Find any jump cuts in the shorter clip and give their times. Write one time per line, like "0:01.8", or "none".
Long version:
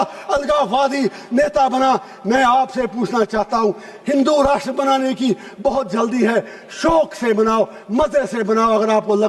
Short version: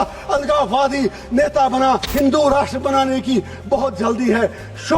0:02.1